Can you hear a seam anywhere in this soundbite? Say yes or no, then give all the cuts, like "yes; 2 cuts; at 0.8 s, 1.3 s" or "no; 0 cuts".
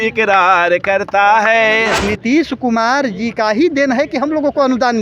yes; 1 cut; at 2.0 s